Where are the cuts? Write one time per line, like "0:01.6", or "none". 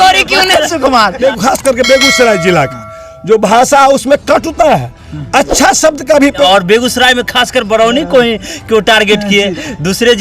0:01.2
0:06.4